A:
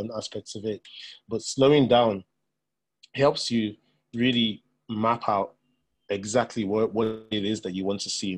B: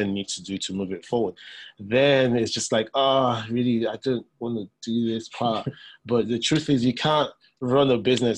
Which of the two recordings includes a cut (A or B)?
A